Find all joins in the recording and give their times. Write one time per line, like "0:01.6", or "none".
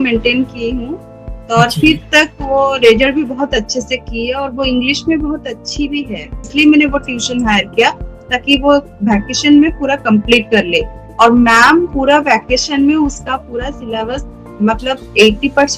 0:06.5